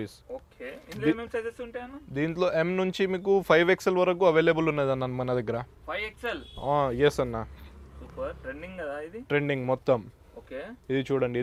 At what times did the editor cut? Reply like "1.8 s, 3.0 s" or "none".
none

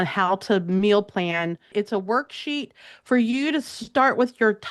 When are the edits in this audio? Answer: 1.7 s

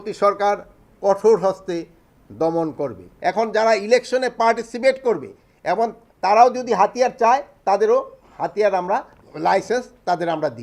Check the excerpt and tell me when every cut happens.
3.1 s, 9.2 s

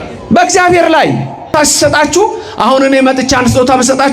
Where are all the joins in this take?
1.5 s

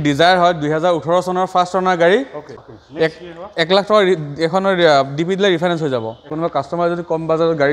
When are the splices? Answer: 2.5 s, 6.3 s

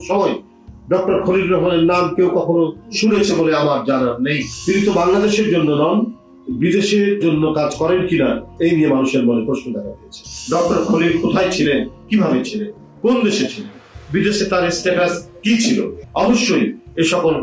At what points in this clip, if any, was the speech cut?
4.5 s, 10.3 s, 16.0 s

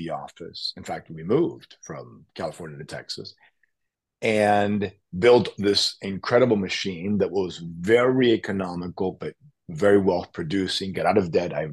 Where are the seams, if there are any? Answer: none

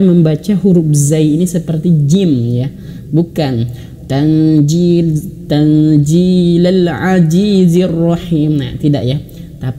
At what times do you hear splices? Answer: none

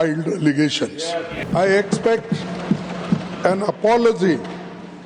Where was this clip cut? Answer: 1.5 s

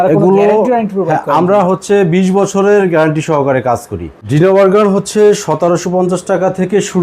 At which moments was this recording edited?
4.2 s

